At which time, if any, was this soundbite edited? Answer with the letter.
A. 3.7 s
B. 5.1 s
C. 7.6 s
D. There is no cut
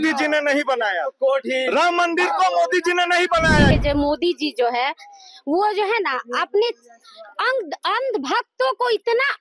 A